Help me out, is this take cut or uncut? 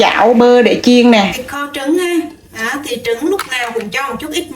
cut